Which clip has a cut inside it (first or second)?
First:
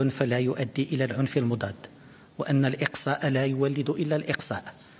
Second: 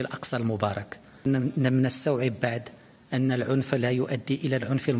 second